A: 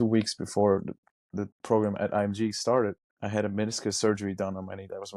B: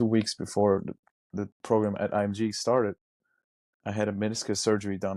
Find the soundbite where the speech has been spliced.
A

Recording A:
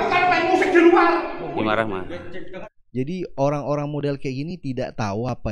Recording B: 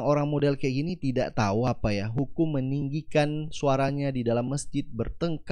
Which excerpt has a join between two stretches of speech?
A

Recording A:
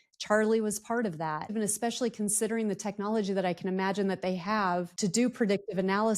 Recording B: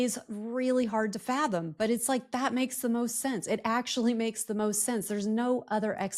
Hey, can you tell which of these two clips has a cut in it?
A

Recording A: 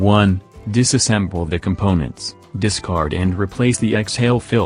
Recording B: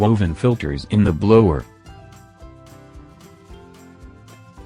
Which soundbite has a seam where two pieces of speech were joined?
B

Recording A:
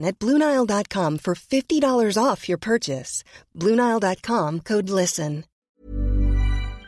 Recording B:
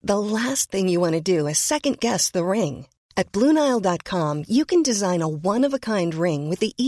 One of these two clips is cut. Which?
A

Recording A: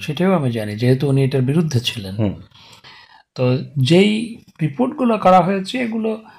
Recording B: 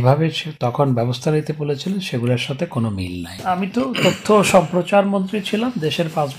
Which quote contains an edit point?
B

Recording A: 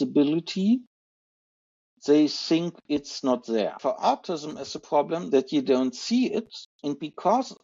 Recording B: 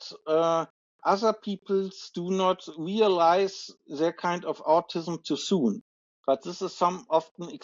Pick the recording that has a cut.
A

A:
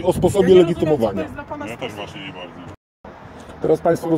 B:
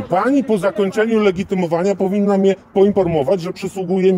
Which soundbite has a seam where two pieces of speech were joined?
A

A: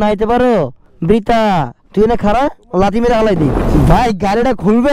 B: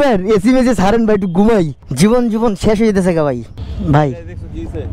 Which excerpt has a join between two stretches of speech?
A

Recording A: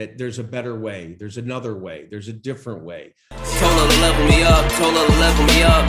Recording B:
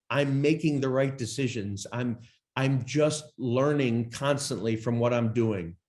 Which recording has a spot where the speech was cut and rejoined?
A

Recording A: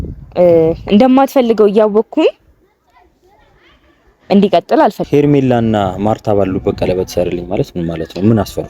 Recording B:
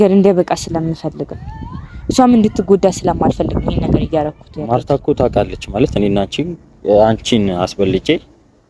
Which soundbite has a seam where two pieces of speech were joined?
A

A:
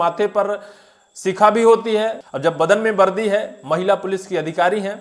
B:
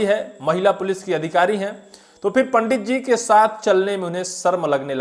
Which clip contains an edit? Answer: A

